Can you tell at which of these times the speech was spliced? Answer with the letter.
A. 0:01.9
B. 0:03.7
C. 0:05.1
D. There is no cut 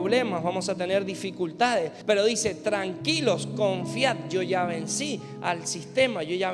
A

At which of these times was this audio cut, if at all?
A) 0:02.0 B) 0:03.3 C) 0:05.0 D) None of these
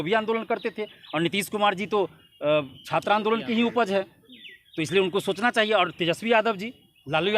D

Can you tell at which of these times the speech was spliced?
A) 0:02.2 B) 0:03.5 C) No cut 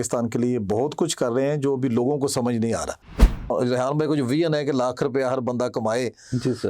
B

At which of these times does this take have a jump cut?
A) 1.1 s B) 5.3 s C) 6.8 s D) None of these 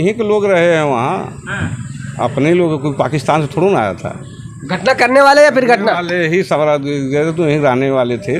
D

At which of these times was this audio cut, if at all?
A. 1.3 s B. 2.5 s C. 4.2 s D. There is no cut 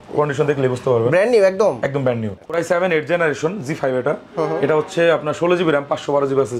B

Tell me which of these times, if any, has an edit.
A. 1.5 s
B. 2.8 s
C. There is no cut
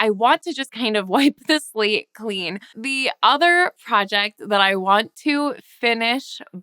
B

